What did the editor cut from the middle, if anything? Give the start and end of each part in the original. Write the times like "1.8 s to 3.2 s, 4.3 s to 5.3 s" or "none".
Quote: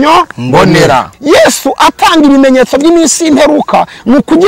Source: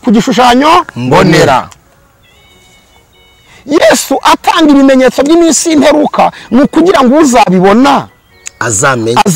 1.7 s to 3.6 s